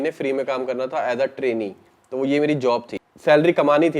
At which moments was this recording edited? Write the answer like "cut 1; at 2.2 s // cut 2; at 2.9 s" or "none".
cut 1; at 3.0 s